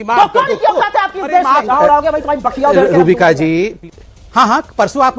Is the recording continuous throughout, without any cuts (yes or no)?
no